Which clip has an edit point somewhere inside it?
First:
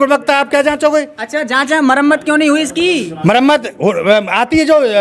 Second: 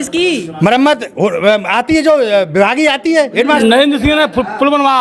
second; 1 cut; at 3.3 s

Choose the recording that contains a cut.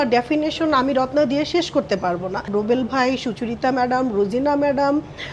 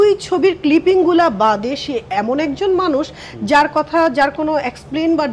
first; 1 cut; at 2.5 s

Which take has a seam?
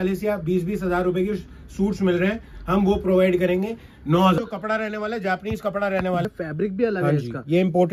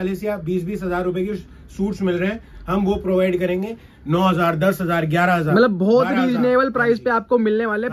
first; 2 cuts; at 4.4 s, 6.2 s

